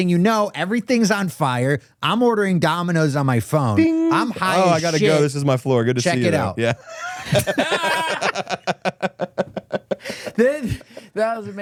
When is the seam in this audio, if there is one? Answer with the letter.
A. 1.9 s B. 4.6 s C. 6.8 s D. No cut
D